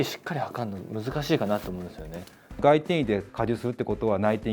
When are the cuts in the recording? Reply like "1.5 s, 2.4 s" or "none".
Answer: 2.6 s, 3.3 s